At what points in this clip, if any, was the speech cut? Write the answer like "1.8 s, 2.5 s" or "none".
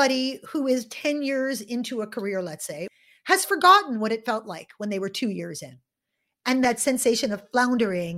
2.9 s, 6.6 s